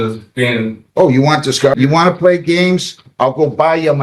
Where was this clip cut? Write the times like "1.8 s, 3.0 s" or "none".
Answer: 1.7 s

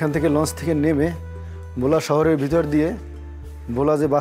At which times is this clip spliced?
none

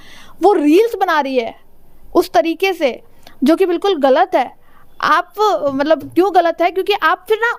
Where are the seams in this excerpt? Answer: none

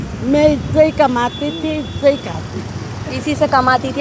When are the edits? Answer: none

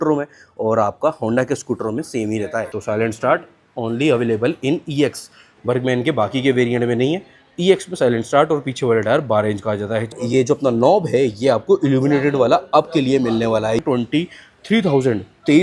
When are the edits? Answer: 2.7 s, 10.1 s, 13.8 s

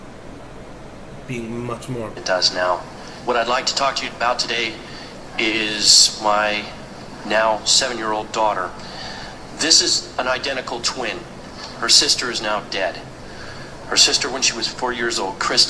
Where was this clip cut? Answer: none

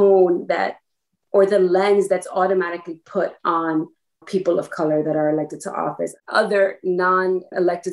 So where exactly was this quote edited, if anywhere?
6.1 s

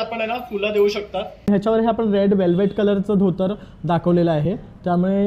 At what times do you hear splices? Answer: 1.5 s

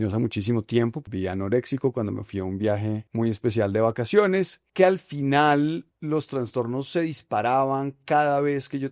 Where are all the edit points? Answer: 1.1 s, 3.1 s, 4.6 s, 5.9 s

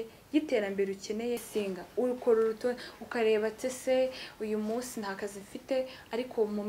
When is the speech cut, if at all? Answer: 1.5 s

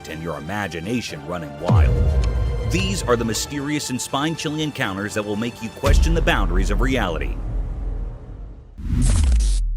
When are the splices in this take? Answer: 8.6 s

